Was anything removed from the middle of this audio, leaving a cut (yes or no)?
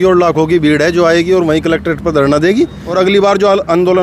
yes